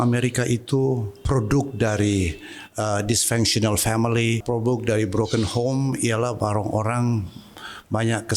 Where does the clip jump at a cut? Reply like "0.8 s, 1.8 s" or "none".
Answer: 1.1 s, 4.4 s